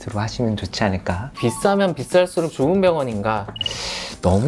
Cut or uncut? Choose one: cut